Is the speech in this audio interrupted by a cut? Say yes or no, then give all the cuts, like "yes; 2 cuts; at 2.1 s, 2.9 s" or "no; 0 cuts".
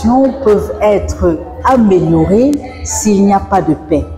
no; 0 cuts